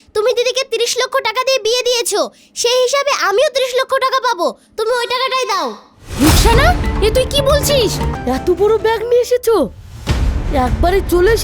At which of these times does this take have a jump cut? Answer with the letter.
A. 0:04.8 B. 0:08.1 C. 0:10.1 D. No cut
B